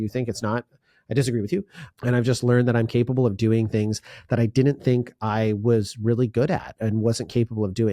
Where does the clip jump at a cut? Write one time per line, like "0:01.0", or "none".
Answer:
0:01.8